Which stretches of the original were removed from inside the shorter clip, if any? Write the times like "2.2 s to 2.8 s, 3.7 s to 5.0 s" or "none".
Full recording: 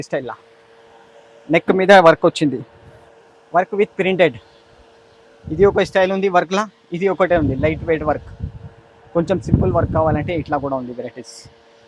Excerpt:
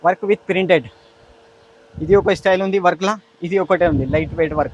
none